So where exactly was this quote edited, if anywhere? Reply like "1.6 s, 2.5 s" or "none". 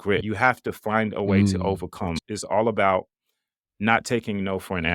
2.2 s